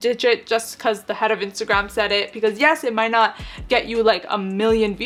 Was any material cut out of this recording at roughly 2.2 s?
no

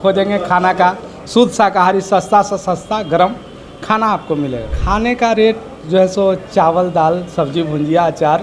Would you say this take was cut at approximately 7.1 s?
no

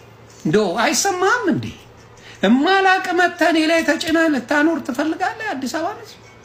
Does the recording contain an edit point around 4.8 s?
no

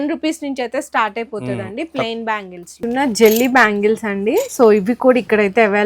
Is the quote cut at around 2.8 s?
yes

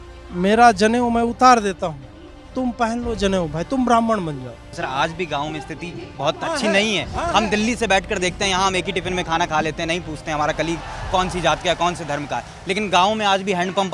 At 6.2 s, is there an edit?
no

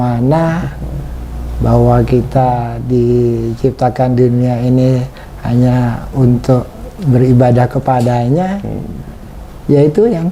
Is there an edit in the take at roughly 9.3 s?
no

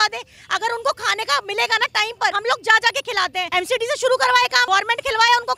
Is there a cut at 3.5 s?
yes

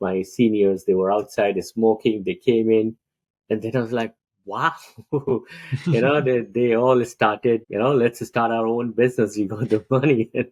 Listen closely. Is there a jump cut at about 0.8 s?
no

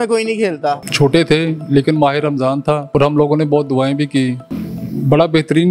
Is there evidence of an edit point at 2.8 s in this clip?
yes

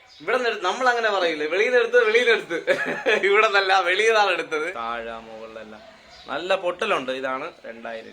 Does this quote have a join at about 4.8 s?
yes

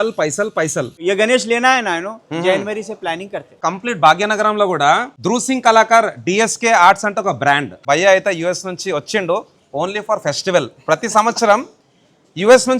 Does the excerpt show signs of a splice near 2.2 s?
no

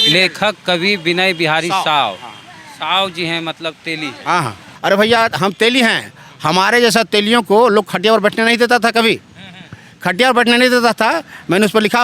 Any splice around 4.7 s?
yes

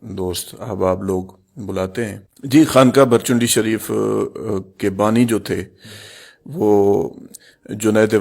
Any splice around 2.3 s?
yes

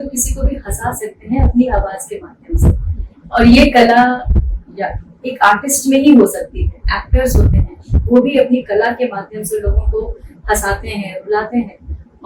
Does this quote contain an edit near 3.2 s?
no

